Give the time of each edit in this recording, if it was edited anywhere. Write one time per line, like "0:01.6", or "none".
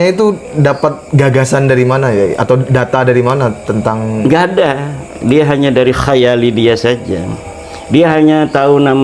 none